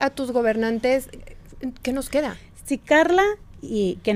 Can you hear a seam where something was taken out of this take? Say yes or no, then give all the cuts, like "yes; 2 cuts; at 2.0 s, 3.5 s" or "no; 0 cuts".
no; 0 cuts